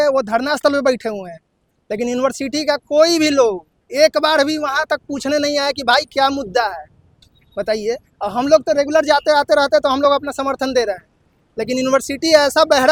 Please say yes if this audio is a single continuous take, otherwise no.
yes